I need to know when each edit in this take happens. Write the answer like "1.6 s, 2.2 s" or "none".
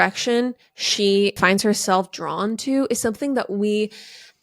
1.4 s